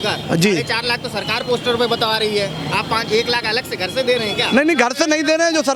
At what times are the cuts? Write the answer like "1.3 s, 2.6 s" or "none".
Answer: none